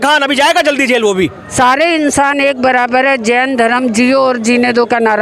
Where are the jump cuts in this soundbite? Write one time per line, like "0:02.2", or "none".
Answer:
0:01.4